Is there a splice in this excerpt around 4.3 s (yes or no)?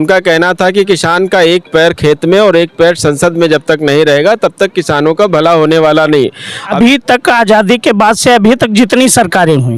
no